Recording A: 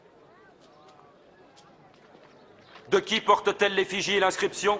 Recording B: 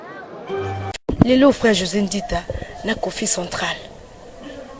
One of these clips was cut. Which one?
B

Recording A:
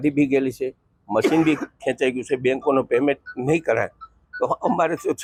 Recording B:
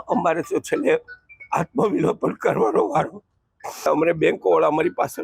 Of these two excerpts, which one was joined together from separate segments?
B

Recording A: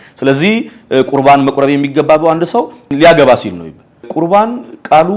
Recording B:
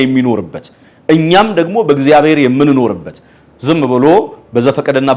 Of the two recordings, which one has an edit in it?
A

